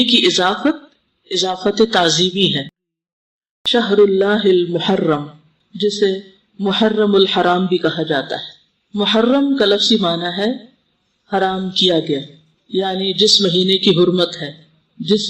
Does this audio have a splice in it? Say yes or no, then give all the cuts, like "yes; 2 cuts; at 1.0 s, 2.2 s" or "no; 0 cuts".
yes; 1 cut; at 3.1 s